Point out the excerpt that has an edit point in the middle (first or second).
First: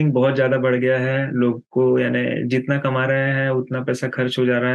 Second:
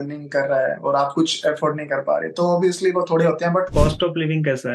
second